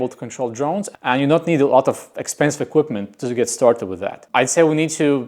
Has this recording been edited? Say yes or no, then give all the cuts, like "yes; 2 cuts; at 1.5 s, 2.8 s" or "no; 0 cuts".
yes; 2 cuts; at 0.9 s, 4.2 s